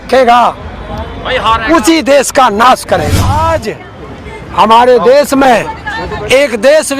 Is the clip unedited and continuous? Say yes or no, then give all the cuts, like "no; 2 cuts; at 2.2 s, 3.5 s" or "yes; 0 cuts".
no; 1 cut; at 3.3 s